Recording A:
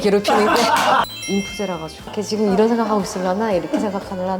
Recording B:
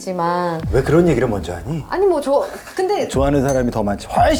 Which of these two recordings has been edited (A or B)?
A